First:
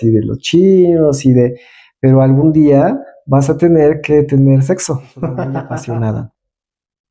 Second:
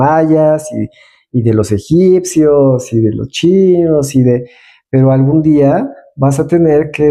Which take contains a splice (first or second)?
first